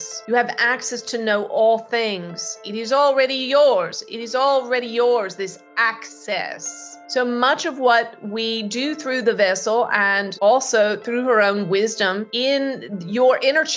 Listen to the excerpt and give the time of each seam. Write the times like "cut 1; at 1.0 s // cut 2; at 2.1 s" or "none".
cut 1; at 2.6 s